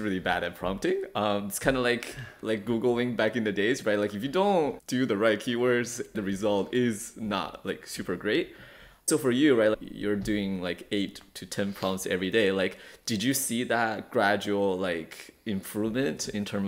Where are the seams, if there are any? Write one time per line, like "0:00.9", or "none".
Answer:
0:04.8
0:06.2
0:09.1
0:09.8